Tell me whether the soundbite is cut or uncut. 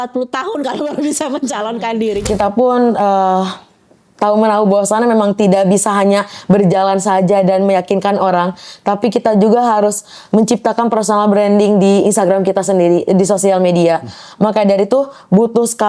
cut